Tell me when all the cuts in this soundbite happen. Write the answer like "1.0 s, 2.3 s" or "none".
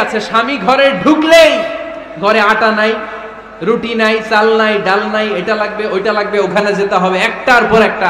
none